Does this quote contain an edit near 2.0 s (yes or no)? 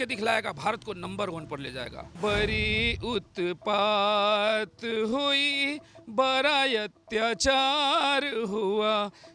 yes